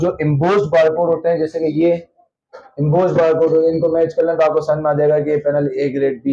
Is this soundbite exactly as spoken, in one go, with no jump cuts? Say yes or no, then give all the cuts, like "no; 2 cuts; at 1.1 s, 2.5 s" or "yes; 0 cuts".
yes; 0 cuts